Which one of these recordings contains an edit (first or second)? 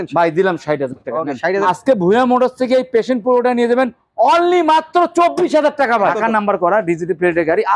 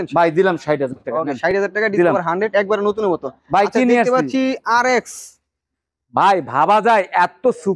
first